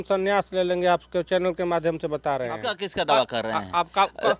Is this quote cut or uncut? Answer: cut